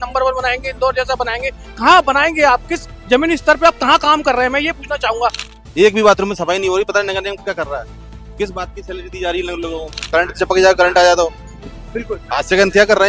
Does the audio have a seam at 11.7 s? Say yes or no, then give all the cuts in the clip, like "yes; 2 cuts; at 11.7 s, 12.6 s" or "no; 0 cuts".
no; 2 cuts; at 5.4 s, 9.9 s